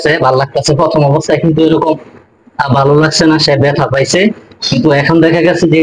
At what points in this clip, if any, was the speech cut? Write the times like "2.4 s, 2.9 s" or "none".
none